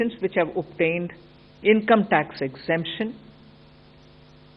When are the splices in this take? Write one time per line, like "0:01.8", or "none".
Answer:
none